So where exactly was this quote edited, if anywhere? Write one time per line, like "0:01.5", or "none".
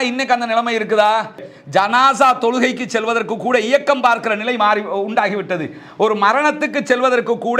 0:01.5